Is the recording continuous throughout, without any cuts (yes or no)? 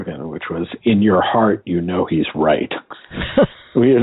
yes